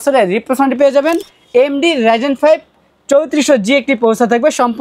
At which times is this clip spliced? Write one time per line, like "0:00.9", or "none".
0:01.3